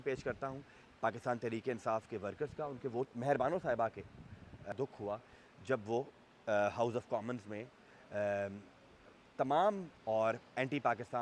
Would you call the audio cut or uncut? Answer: cut